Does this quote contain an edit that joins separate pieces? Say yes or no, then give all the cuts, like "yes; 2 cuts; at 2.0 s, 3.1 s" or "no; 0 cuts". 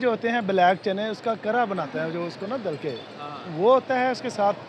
no; 0 cuts